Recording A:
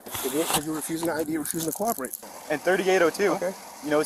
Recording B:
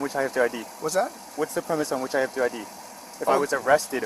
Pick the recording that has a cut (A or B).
A